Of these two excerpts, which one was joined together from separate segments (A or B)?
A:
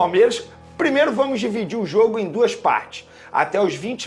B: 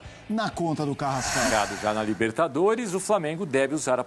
B